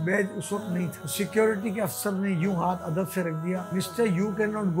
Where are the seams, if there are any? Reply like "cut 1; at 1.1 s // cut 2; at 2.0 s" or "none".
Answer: cut 1; at 1.0 s // cut 2; at 3.7 s